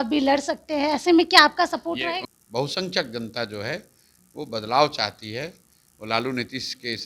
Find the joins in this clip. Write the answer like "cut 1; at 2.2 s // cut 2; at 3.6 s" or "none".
cut 1; at 2.3 s